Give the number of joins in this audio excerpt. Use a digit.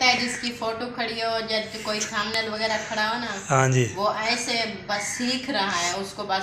0